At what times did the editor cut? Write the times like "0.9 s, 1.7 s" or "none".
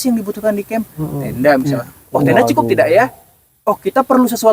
none